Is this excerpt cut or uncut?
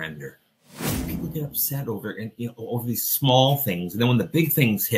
cut